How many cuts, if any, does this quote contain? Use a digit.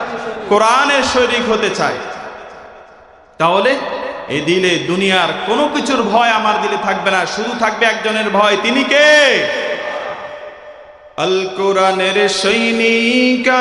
0